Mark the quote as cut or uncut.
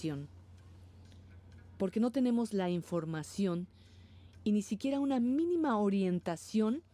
uncut